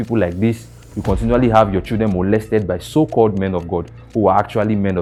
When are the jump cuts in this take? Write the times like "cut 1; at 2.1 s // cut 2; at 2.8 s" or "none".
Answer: none